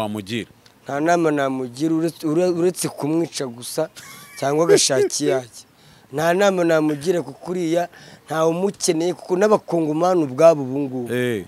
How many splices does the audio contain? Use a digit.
0